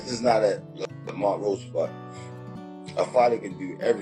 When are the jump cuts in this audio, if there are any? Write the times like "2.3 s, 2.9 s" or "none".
none